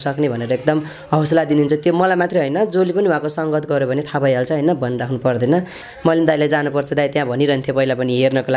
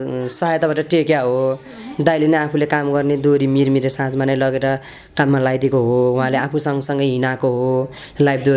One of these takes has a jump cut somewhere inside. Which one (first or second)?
first